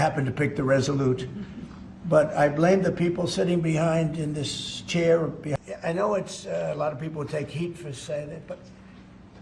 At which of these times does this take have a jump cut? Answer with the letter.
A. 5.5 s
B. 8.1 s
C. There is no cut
A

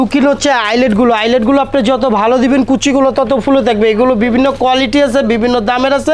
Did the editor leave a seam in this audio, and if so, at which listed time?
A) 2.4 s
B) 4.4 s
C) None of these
C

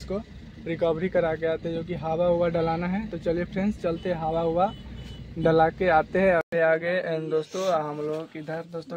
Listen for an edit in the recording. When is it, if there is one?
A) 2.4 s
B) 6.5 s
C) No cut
B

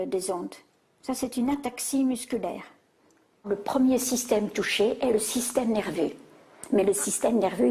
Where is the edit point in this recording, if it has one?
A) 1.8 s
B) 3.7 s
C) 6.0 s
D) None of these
B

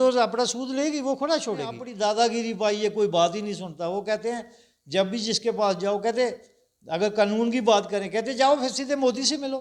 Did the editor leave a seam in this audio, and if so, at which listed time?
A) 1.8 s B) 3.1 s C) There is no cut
A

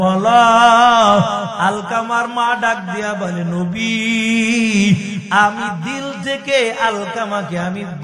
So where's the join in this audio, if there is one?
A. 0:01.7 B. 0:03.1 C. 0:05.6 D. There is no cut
D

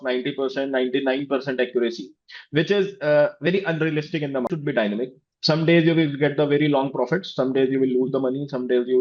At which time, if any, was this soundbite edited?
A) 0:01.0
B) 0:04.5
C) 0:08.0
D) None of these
B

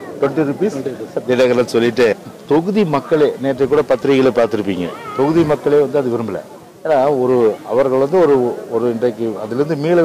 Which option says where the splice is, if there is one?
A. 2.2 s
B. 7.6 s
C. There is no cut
A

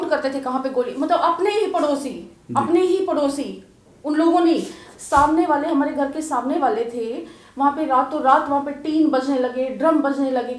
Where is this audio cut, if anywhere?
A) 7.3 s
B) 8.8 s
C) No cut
C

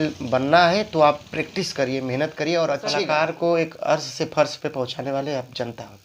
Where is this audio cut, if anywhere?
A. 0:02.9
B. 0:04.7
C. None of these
A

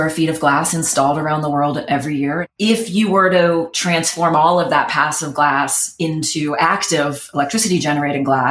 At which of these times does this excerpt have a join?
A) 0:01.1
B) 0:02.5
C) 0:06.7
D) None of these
B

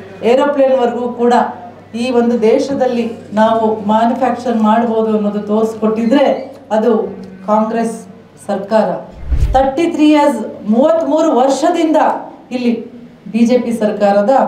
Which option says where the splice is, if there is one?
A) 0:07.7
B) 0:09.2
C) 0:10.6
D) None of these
B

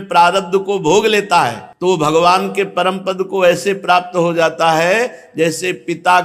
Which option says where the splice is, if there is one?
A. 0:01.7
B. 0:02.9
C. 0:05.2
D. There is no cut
A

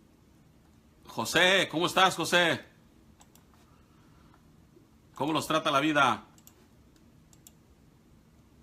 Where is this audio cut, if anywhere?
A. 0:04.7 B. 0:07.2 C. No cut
B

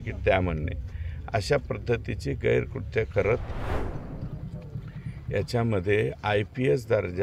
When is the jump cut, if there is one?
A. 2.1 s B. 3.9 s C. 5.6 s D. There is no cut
B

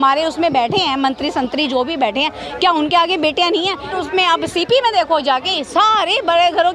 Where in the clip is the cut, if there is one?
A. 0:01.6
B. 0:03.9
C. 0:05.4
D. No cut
B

